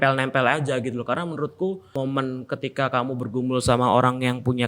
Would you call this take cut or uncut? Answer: cut